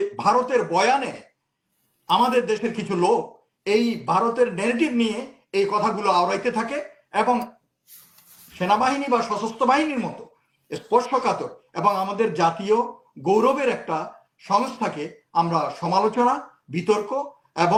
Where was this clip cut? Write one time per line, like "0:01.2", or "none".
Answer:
none